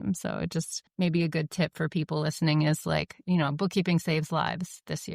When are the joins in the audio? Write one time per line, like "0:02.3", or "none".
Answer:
0:00.8
0:03.2